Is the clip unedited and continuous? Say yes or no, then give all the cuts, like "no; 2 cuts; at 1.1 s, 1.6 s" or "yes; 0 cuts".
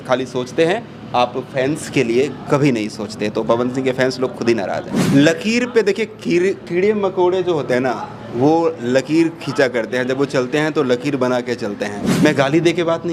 no; 2 cuts; at 4.9 s, 12.1 s